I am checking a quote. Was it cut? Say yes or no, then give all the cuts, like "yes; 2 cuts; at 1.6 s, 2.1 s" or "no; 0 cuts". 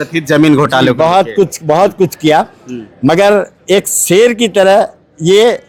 no; 0 cuts